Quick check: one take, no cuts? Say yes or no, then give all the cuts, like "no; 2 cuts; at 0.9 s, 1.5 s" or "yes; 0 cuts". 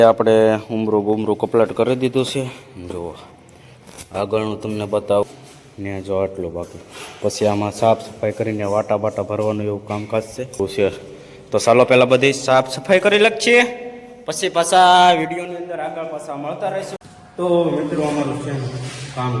no; 3 cuts; at 5.2 s, 10.6 s, 16.9 s